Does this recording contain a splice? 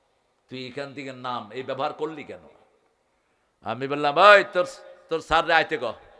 no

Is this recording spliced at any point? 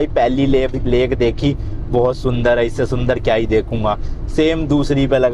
no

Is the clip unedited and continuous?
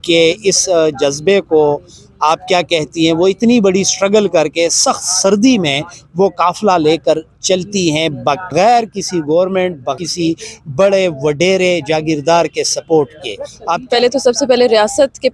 no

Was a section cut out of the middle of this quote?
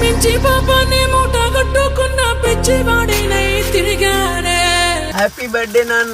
yes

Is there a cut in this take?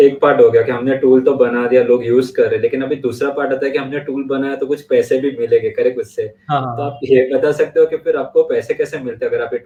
no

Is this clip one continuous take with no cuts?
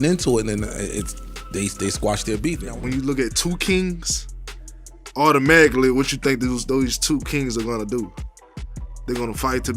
no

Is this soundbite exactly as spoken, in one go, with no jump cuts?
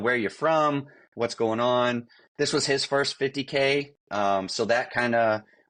yes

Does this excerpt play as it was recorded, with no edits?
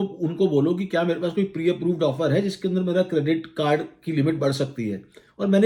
yes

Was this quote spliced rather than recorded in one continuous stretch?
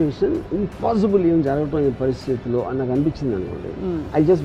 no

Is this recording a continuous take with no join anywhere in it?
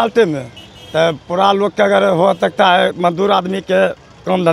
yes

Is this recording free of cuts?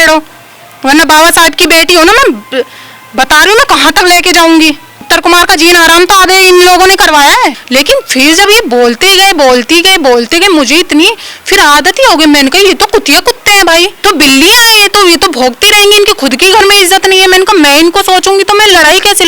no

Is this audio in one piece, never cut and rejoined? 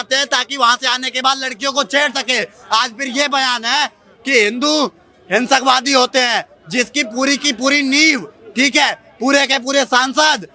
yes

